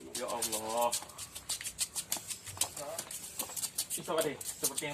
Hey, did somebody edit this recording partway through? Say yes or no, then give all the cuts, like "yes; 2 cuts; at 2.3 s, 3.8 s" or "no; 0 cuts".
no; 0 cuts